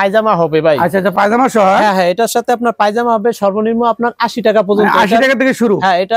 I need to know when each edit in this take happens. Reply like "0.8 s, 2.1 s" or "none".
none